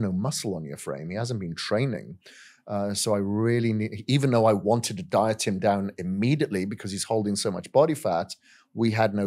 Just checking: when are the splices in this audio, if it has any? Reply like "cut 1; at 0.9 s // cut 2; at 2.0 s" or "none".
none